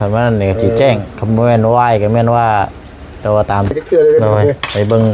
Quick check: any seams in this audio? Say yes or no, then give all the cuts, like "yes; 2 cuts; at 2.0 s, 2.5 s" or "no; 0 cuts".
yes; 1 cut; at 3.7 s